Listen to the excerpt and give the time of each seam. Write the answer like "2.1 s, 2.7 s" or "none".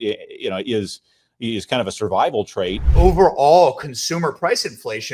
2.8 s

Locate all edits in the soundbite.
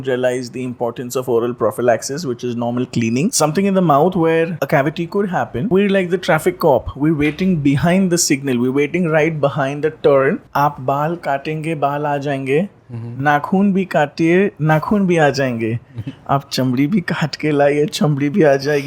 3.3 s, 4.5 s, 5.7 s, 10.4 s

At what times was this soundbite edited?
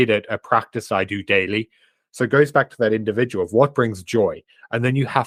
none

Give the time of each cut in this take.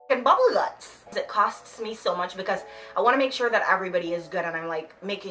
1.1 s

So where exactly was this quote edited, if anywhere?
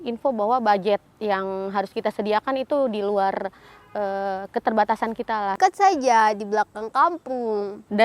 5.5 s

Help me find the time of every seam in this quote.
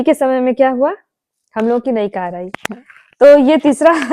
none

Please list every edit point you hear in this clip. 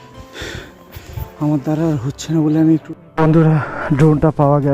2.9 s

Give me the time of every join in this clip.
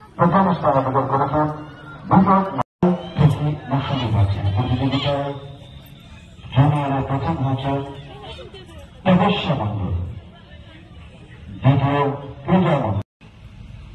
2.7 s, 13.1 s

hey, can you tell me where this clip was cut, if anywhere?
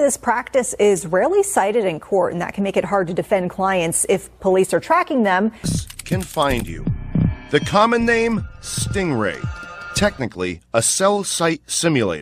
5.7 s

